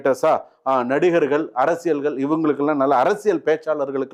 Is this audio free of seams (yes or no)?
yes